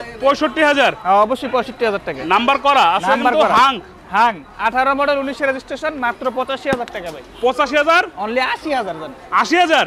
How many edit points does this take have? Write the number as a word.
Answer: zero